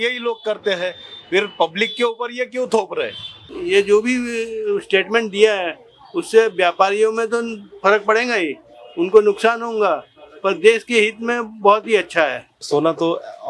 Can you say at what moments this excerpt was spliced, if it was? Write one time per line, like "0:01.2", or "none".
0:03.5
0:12.5